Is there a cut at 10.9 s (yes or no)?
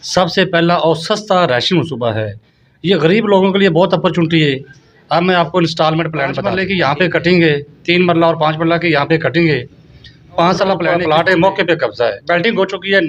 yes